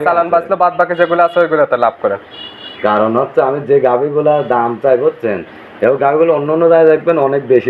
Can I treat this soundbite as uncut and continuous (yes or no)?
yes